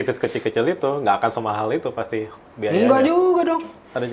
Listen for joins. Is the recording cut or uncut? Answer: uncut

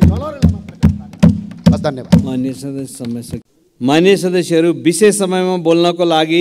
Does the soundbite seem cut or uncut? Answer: uncut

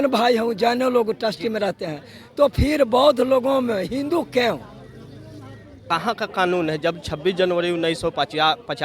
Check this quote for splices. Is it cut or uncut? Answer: cut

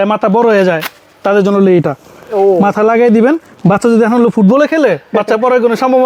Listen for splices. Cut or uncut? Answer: uncut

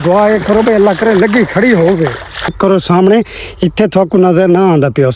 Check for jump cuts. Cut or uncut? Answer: cut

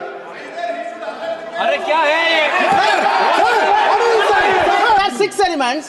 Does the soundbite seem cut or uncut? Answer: cut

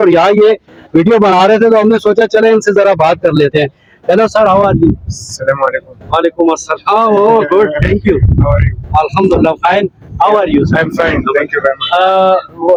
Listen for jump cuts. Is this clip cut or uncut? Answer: uncut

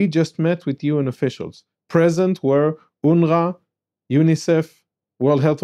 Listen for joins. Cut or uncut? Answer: uncut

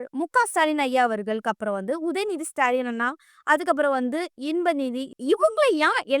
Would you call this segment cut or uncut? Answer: cut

